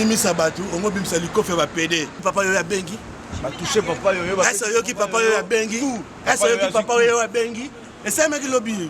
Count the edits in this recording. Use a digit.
1